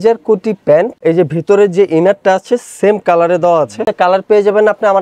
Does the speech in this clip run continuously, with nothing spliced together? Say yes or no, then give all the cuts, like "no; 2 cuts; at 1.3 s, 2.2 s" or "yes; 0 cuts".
no; 2 cuts; at 0.9 s, 3.9 s